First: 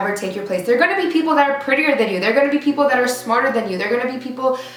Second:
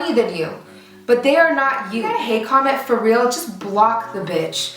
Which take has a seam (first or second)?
second